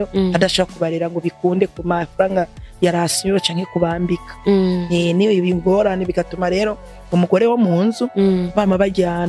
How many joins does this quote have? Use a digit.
0